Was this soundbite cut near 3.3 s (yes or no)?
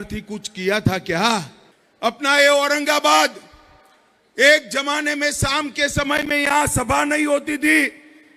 no